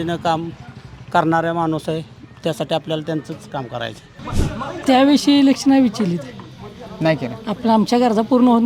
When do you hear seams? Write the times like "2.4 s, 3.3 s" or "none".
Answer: 4.2 s